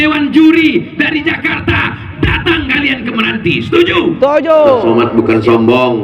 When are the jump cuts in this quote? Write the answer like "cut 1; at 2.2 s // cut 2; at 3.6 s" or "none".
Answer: cut 1; at 4.8 s